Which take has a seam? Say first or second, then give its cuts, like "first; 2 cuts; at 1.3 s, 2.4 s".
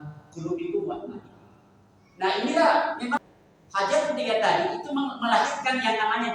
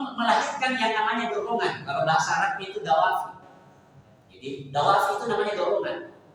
first; 1 cut; at 3.2 s